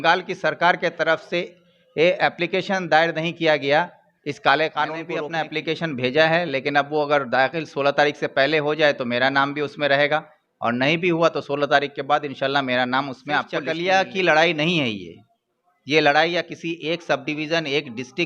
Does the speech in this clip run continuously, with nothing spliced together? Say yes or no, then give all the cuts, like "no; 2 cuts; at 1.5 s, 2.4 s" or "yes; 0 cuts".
no; 2 cuts; at 5.4 s, 13.6 s